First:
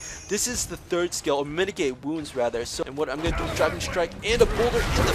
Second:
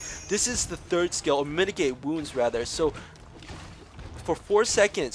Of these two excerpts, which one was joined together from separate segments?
first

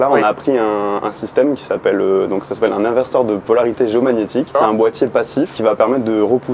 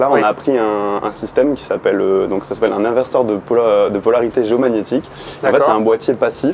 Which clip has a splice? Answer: first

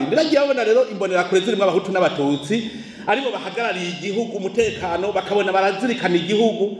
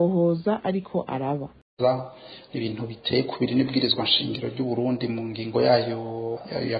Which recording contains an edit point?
second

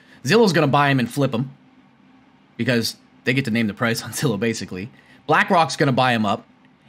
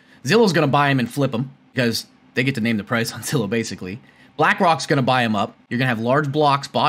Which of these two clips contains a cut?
second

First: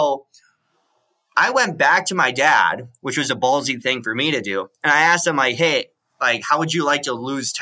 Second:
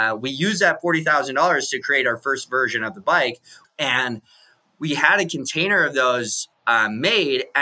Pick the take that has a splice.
second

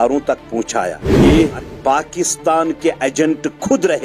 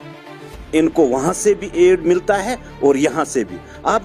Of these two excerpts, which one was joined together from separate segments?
first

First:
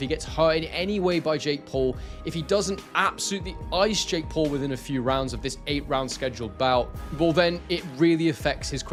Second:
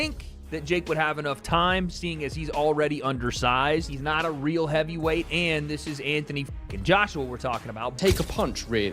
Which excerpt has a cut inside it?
second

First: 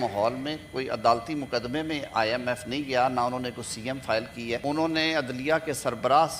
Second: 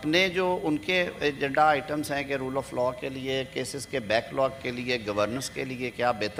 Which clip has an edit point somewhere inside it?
first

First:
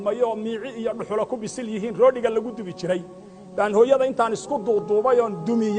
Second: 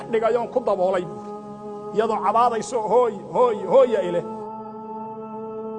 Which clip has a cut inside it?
second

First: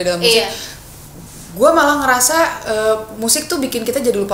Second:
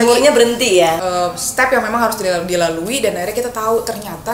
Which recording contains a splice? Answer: second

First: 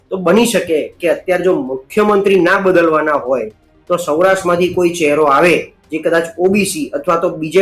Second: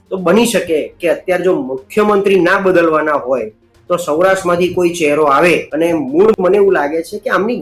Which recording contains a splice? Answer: second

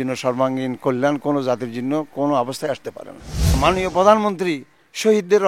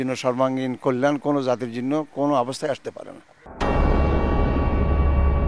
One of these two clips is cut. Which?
first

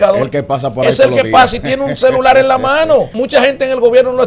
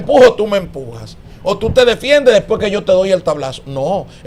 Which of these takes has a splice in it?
first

